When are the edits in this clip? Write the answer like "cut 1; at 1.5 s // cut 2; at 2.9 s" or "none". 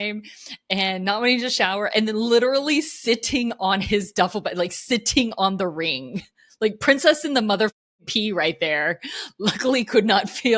none